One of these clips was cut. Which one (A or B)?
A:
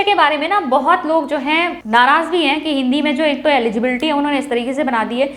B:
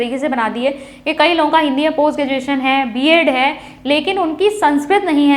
A